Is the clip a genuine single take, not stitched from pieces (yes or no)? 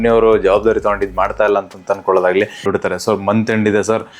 no